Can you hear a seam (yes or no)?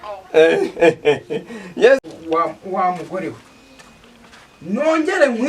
yes